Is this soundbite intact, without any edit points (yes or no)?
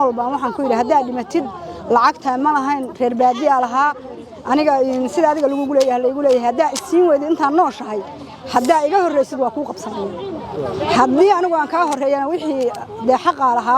yes